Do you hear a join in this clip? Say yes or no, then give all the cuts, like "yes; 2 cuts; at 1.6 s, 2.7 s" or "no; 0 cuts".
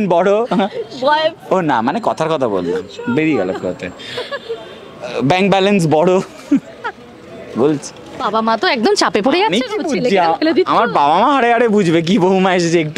yes; 1 cut; at 8.2 s